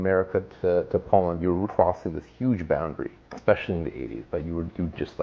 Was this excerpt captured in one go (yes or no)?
no